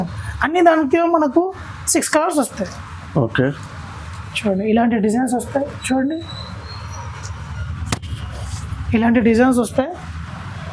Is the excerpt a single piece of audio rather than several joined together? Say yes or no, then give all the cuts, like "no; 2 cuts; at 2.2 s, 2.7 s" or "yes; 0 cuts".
yes; 0 cuts